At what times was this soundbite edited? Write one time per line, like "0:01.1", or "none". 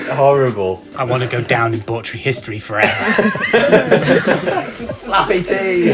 0:00.9